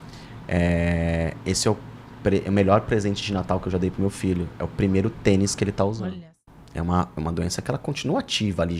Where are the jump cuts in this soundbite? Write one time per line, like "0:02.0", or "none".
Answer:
0:06.0